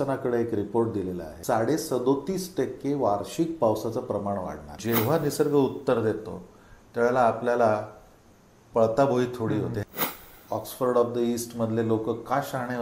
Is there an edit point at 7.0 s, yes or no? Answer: no